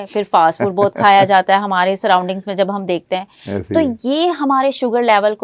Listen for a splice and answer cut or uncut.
uncut